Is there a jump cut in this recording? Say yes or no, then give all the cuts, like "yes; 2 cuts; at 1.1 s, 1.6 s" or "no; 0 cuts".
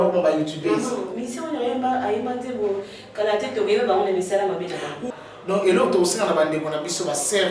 yes; 1 cut; at 5.0 s